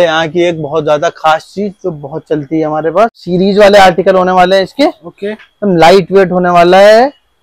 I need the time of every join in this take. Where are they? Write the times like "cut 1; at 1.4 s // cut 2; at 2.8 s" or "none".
cut 1; at 3.2 s